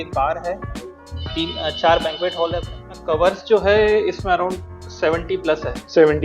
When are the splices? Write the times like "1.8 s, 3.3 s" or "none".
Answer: 2.9 s